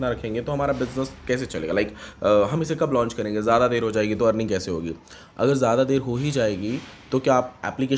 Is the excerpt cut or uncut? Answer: uncut